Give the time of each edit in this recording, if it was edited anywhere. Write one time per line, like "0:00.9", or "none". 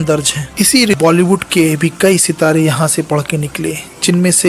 0:00.9